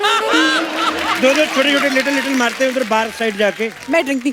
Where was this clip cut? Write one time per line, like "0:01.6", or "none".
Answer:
none